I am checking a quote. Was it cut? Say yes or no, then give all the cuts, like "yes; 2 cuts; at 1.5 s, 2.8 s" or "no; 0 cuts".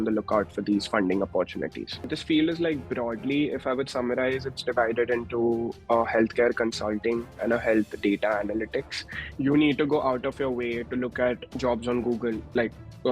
yes; 2 cuts; at 2.2 s, 9.3 s